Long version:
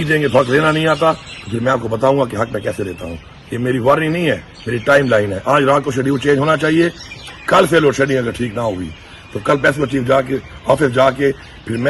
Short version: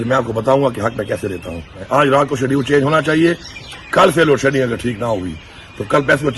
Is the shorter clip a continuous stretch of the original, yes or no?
no